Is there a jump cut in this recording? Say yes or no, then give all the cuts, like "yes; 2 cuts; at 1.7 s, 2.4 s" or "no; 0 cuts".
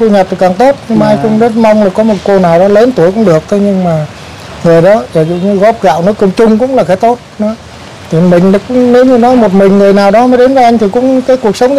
no; 0 cuts